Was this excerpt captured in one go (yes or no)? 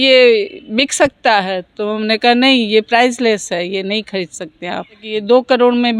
no